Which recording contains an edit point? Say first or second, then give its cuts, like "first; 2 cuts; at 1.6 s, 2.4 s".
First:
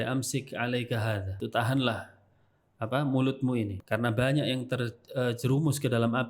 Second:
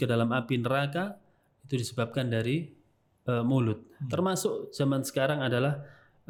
first; 2 cuts; at 1.4 s, 3.8 s